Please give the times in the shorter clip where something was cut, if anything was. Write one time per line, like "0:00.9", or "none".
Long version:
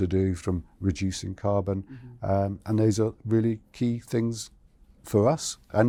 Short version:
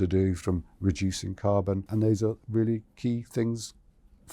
0:01.8

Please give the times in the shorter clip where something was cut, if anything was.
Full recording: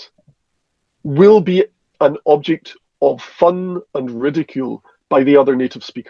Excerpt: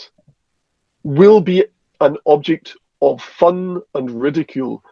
none

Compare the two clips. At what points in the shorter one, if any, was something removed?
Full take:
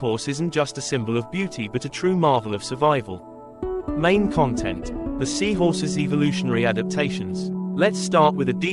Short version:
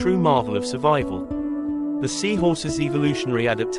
0:01.6

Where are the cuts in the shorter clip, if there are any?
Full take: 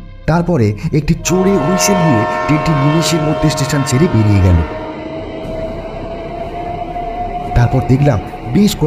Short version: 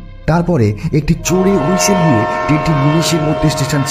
none

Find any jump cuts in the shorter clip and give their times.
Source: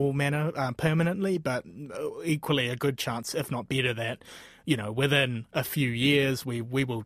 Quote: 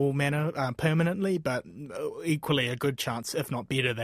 none

